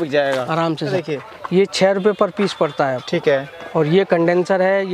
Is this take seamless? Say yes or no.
no